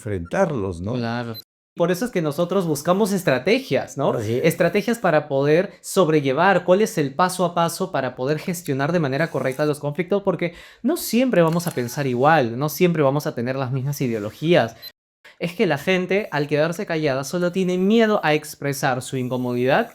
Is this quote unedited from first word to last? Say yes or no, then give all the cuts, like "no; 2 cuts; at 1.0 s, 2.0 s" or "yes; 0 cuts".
no; 2 cuts; at 1.7 s, 15.1 s